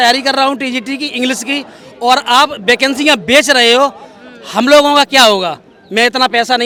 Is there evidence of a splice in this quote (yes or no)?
no